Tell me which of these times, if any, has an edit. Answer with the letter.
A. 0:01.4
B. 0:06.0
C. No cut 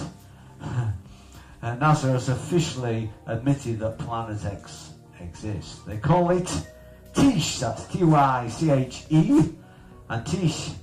B